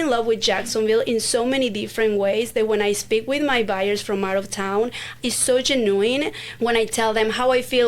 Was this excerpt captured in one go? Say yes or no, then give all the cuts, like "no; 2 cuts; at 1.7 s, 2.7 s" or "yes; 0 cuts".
no; 1 cut; at 5.2 s